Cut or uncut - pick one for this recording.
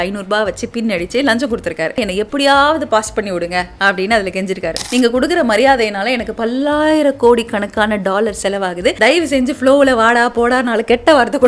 cut